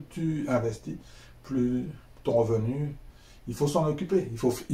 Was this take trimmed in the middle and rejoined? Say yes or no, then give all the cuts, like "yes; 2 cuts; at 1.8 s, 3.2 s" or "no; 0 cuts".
no; 0 cuts